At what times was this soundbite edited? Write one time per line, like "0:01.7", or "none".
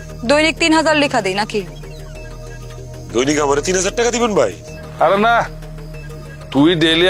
none